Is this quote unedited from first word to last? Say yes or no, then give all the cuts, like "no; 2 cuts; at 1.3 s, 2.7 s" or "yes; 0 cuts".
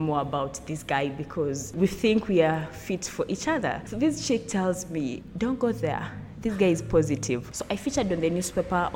no; 4 cuts; at 1.7 s, 3.8 s, 5.2 s, 7.5 s